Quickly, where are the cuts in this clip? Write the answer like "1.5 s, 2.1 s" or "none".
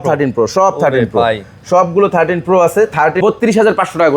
3.2 s